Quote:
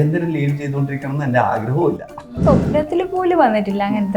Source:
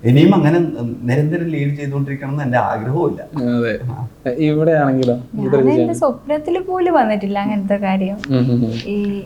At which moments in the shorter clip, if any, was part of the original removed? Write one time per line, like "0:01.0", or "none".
0:02.3